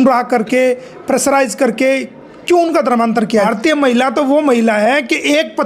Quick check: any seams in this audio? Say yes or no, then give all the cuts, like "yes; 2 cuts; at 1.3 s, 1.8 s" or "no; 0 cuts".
yes; 1 cut; at 3.5 s